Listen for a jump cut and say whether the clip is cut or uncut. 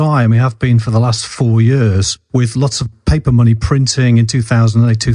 cut